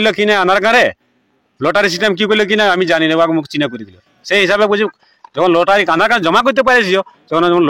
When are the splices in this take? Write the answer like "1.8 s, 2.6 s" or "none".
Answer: none